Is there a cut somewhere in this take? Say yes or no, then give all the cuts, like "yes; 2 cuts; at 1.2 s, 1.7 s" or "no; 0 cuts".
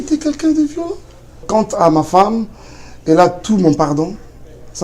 yes; 1 cut; at 1.4 s